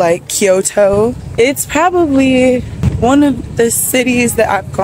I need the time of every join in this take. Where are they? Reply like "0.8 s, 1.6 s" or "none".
1.2 s, 2.8 s